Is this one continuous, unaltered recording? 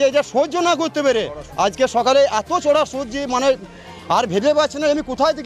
yes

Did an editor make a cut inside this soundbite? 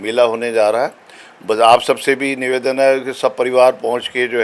no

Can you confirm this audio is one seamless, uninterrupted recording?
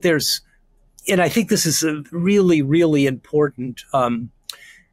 yes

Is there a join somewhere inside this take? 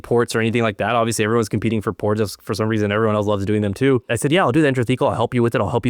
yes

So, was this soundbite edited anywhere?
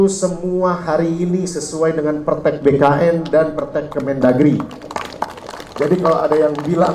no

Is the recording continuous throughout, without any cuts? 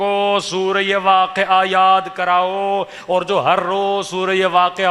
yes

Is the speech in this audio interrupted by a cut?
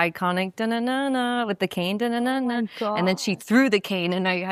no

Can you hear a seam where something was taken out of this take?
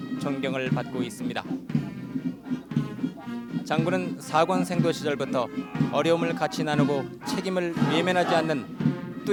no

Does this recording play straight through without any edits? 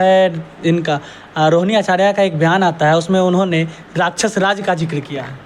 yes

